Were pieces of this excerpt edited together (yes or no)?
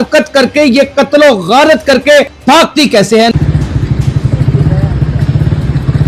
yes